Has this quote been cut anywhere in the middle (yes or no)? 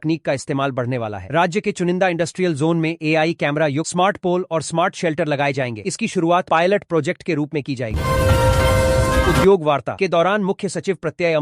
yes